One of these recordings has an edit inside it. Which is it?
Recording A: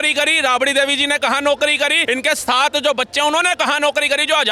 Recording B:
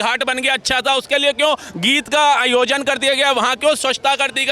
A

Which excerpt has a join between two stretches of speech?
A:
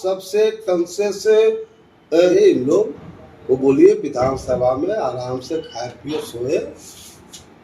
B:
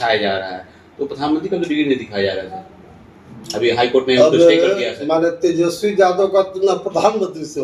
A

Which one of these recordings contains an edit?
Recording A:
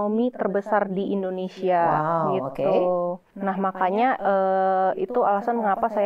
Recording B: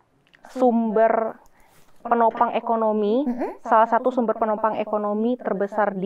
A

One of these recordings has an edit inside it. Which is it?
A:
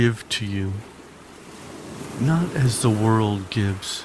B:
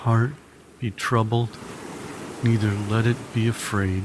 A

